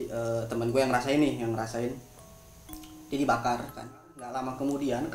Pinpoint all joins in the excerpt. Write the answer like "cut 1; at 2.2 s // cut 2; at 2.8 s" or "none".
cut 1; at 4.2 s